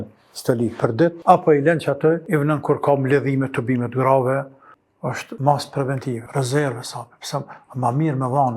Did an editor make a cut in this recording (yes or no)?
yes